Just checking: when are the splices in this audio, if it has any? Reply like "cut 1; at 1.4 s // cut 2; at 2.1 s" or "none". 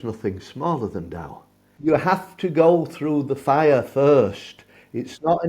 cut 1; at 1.7 s